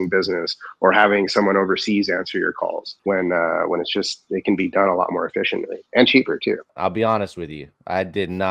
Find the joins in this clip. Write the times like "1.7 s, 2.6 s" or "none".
6.7 s